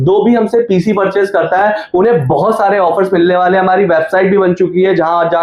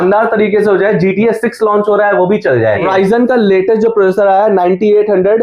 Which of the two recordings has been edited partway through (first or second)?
second